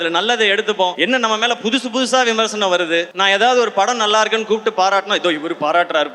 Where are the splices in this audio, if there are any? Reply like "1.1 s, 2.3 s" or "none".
0.9 s, 3.1 s